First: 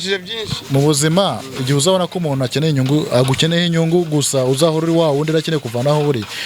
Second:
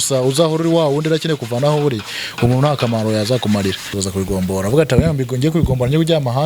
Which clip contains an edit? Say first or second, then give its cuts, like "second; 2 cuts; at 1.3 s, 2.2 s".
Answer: second; 1 cut; at 4.0 s